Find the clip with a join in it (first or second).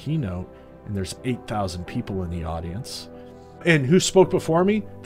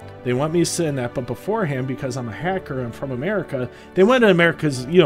first